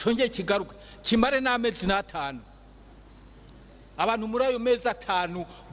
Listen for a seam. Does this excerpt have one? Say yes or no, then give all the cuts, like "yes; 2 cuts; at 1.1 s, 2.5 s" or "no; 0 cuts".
no; 0 cuts